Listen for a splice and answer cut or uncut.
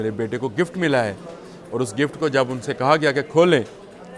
uncut